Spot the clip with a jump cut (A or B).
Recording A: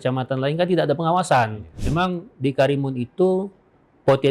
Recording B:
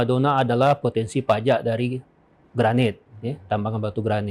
A